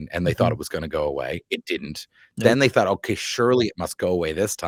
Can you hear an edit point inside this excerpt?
no; 0 cuts

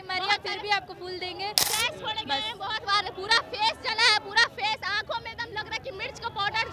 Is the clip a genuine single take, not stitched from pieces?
no; 1 cut; at 1.7 s

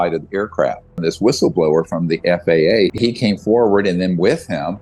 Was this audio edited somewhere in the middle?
yes; 2 cuts; at 1.0 s, 2.9 s

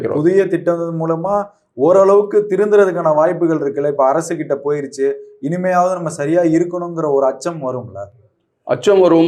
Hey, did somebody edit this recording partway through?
no; 0 cuts

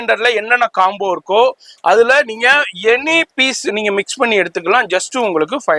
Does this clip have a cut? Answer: no; 0 cuts

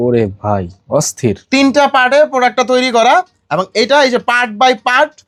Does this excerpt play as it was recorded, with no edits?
yes; 0 cuts

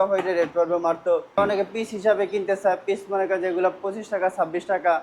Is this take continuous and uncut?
no; 1 cut; at 1.4 s

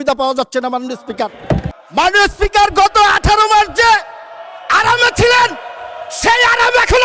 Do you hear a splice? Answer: yes; 1 cut; at 1.7 s

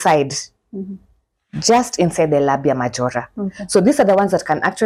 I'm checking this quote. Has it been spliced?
no; 0 cuts

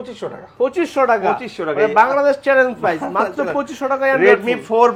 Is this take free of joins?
yes; 0 cuts

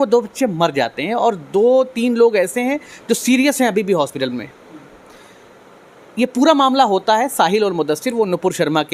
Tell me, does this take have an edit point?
no; 0 cuts

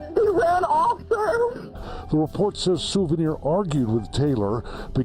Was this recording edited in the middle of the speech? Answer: yes; 1 cut; at 1.7 s

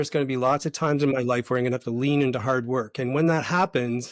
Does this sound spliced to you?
no; 0 cuts

